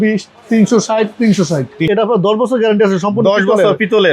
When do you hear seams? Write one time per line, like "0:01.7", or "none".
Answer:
0:01.8